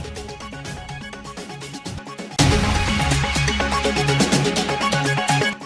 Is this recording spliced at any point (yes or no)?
no